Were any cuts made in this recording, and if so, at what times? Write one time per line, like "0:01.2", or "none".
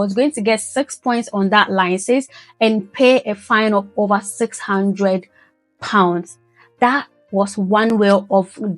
none